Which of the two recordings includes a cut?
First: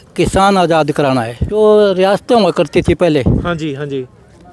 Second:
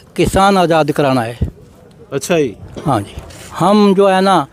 first; 1 cut; at 1.5 s

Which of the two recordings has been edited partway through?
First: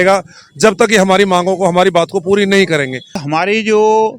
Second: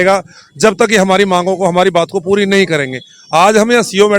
first; 1 cut; at 3.1 s

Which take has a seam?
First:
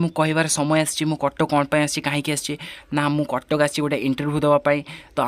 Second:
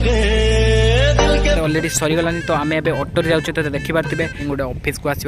second; 2 cuts; at 1.6 s, 4.4 s

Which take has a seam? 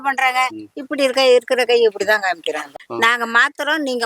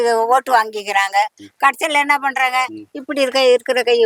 first; 1 cut; at 2.8 s

